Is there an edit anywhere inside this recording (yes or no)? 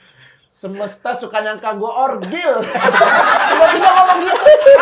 no